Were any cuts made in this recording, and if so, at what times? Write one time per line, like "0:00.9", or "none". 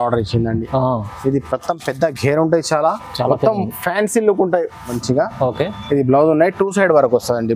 0:04.9